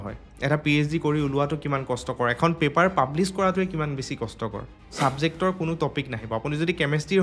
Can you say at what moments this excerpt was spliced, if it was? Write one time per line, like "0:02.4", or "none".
0:04.8